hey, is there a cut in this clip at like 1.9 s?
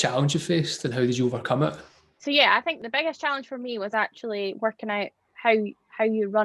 yes; 2 cuts; at 1.9 s, 2.8 s

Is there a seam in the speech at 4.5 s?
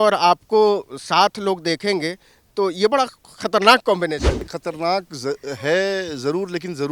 yes; 1 cut; at 4.5 s

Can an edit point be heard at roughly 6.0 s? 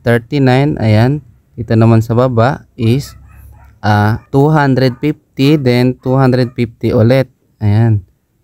no; 1 cut; at 4.2 s

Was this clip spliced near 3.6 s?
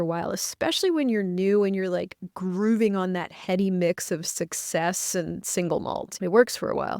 no; 1 cut; at 6.1 s

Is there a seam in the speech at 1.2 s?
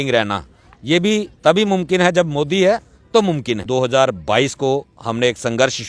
no; 1 cut; at 3.6 s

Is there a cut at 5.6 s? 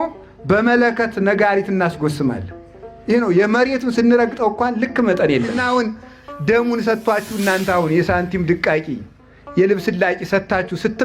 yes; 1 cut; at 5.6 s

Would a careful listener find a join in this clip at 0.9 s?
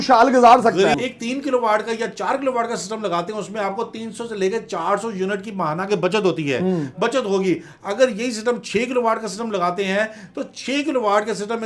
yes; 1 cut; at 0.9 s

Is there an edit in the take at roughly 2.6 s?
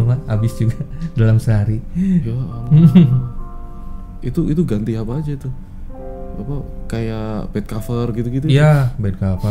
no; 0 cuts

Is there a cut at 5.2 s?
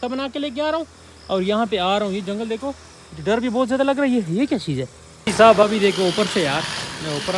yes; 1 cut; at 5.2 s

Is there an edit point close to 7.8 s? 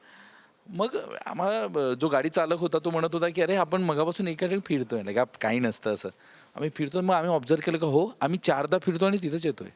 no; 0 cuts

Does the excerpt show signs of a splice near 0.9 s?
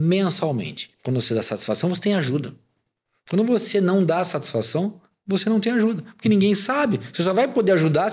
yes; 1 cut; at 0.9 s

